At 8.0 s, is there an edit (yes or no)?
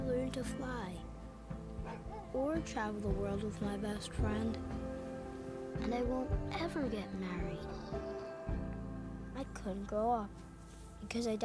yes